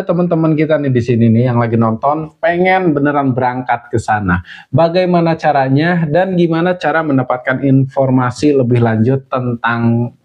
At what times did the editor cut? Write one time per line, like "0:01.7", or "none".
none